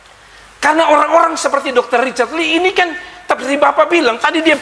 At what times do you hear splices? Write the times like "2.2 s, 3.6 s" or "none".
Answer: none